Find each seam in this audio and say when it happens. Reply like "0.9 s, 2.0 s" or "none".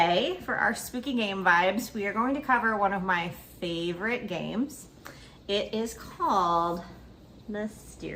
none